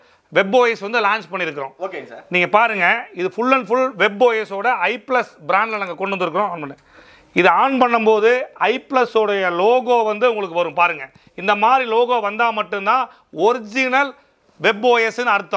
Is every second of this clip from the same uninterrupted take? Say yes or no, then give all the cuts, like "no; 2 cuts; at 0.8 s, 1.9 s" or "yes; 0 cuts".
yes; 0 cuts